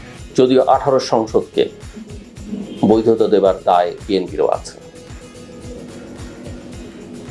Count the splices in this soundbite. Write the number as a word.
zero